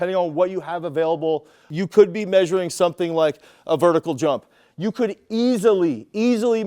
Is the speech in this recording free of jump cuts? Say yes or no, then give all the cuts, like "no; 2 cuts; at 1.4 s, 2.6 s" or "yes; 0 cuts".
no; 1 cut; at 1.7 s